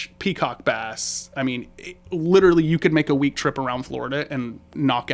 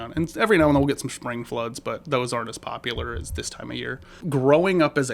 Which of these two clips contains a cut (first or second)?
second